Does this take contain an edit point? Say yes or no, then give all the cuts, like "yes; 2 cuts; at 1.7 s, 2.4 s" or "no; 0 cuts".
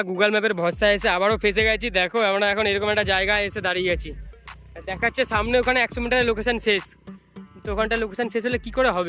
no; 0 cuts